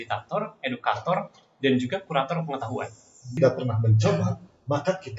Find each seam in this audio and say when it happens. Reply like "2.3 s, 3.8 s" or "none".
3.4 s